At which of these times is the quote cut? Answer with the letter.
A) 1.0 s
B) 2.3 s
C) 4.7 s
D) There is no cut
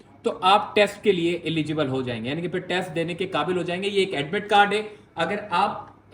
D